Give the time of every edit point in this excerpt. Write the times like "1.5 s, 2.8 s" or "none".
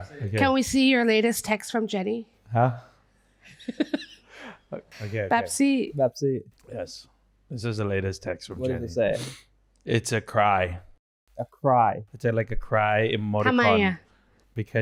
none